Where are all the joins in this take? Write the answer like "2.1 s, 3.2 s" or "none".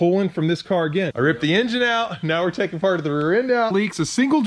1.1 s, 3.7 s